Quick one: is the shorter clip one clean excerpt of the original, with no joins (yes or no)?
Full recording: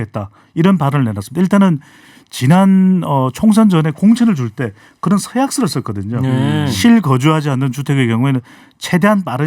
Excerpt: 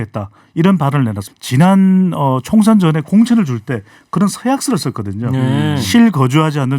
no